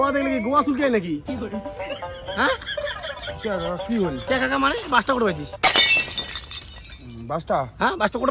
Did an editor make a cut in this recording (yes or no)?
no